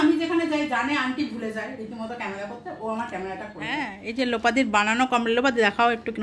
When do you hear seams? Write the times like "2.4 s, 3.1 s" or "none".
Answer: 3.7 s